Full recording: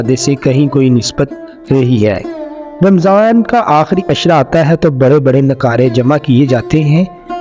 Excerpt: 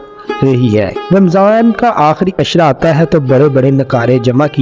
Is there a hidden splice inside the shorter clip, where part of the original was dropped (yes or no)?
yes